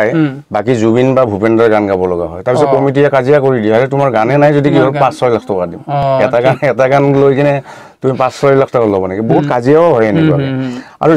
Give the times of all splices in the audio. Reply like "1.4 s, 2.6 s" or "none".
none